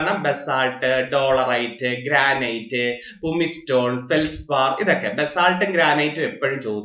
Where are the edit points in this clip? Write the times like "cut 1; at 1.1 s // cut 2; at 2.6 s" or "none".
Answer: none